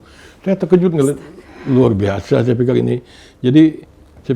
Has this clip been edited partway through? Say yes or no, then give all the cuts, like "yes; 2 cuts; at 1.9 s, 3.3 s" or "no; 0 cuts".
no; 0 cuts